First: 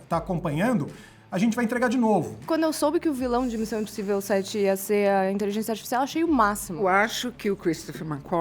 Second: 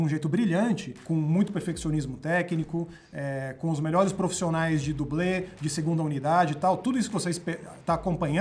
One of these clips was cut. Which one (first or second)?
first